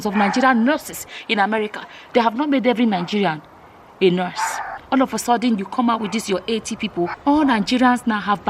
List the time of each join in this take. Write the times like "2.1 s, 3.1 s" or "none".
4.7 s, 7.1 s